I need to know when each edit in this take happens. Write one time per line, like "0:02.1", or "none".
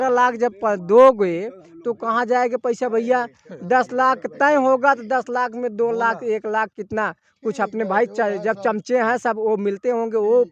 none